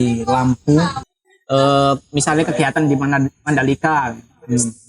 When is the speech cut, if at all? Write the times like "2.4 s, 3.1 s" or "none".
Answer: 1.1 s